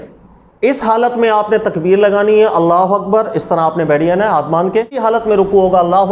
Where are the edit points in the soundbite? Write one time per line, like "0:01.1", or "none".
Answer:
0:05.0